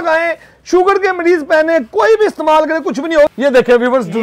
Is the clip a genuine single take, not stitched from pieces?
no; 1 cut; at 3.3 s

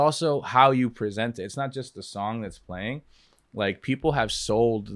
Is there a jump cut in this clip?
no; 0 cuts

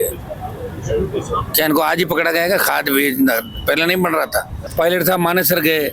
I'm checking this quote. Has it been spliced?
yes; 1 cut; at 4.6 s

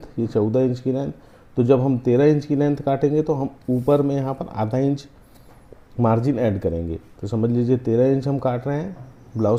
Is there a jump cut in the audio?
no; 0 cuts

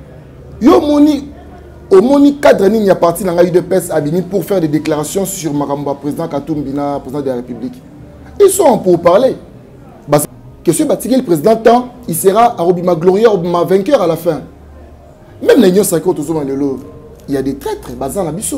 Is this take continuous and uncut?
no; 1 cut; at 10.2 s

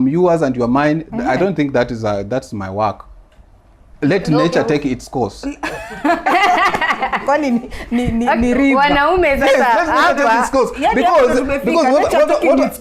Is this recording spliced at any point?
no; 0 cuts

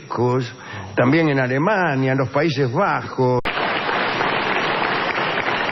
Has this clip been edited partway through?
no; 0 cuts

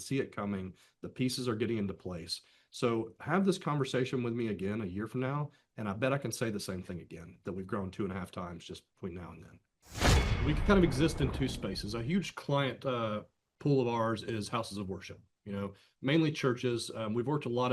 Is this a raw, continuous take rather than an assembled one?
no; 1 cut; at 10.1 s

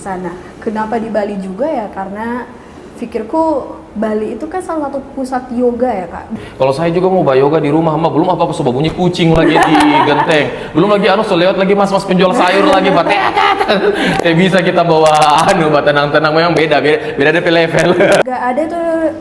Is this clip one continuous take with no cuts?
no; 2 cuts; at 6.3 s, 18.2 s

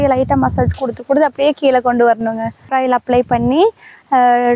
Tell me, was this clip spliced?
yes; 1 cut; at 2.7 s

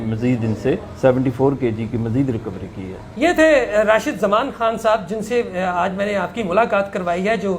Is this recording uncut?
yes; 0 cuts

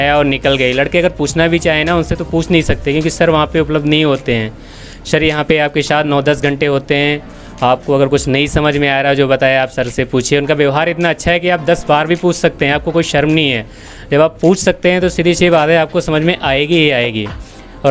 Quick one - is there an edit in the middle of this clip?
no; 0 cuts

